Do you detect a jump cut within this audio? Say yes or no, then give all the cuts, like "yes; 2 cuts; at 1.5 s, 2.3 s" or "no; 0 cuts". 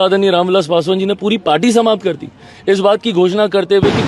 no; 0 cuts